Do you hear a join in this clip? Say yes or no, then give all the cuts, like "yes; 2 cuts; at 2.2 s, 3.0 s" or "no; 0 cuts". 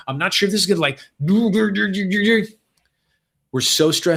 no; 0 cuts